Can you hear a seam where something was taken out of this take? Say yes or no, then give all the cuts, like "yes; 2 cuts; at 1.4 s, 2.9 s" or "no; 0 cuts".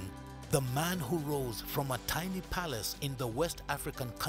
no; 0 cuts